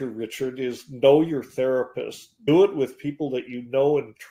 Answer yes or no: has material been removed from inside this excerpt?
yes